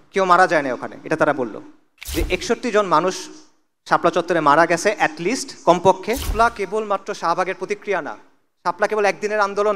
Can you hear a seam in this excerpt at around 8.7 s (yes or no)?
no